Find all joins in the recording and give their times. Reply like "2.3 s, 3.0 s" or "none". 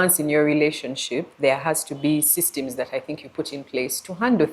none

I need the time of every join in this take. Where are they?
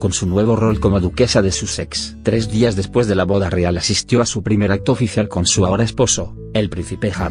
1.6 s

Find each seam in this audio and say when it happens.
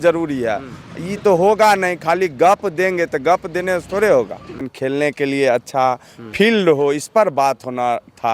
4.6 s

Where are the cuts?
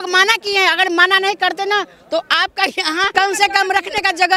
3.1 s

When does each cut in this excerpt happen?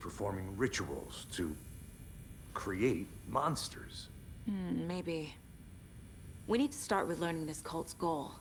none

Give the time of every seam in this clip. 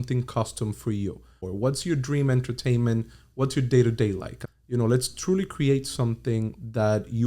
1.4 s, 4.3 s

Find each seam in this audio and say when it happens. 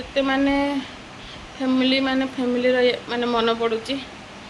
none

